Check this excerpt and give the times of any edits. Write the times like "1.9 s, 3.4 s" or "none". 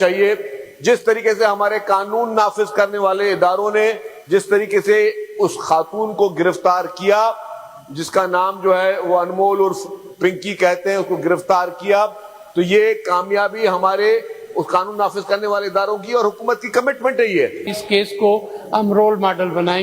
17.7 s